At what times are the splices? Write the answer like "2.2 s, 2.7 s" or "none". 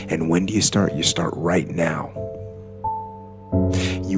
none